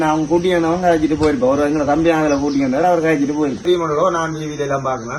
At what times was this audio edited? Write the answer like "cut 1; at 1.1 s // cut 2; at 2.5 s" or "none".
cut 1; at 3.7 s